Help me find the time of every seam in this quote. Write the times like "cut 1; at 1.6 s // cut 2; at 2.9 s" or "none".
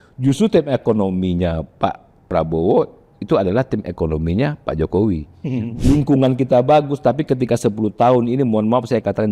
cut 1; at 5.6 s